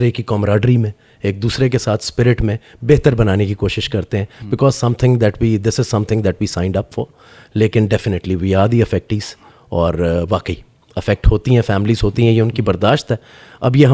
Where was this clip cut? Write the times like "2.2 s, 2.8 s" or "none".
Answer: none